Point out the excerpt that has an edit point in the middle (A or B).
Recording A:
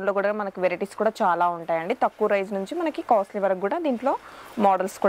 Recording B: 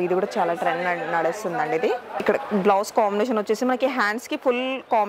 B